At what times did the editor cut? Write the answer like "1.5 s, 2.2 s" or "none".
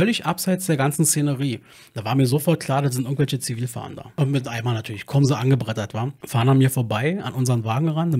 4.1 s, 6.2 s